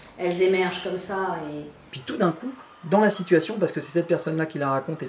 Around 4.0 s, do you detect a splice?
no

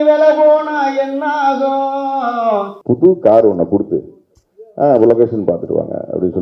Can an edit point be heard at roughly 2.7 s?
yes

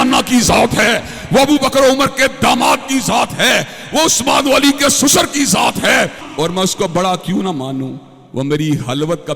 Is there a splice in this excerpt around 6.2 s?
yes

